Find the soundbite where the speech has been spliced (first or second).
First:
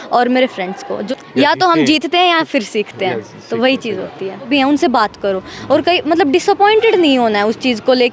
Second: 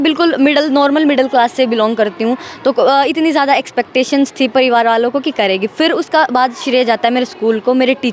first